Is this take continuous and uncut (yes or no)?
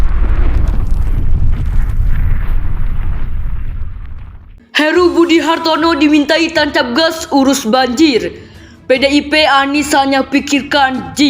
no